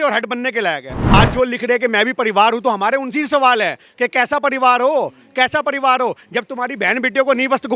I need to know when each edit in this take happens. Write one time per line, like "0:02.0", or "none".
0:00.9